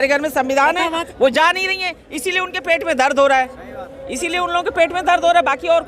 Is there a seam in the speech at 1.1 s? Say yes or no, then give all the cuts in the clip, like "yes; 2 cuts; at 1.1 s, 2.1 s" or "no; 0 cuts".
yes; 1 cut; at 1.1 s